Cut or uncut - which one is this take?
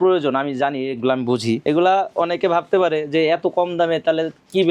cut